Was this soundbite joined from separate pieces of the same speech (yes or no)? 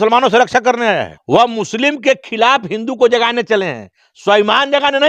yes